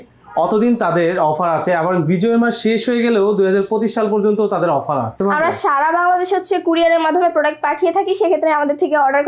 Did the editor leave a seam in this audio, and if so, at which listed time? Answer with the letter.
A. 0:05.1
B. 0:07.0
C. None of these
A